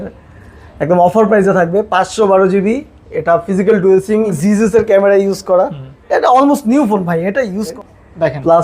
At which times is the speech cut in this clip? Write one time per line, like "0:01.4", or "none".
0:04.3
0:07.6

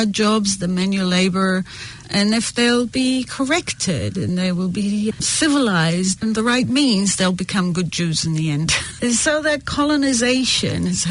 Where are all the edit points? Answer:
0:05.1
0:06.2
0:09.0

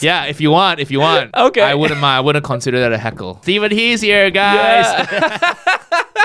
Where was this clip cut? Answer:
0:01.3
0:03.4

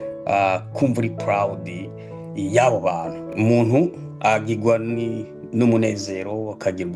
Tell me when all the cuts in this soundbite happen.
0:03.3

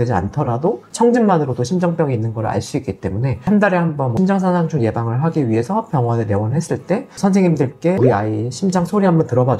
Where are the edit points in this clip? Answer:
0:03.4

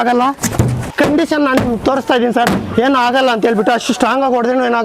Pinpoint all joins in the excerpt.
0:00.9

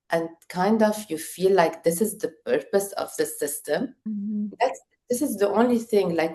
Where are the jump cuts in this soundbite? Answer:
0:04.1

